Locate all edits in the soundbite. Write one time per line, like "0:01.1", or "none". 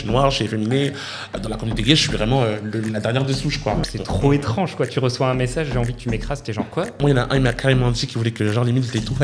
0:01.3
0:03.9
0:07.0